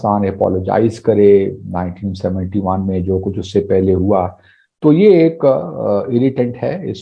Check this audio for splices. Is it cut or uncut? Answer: uncut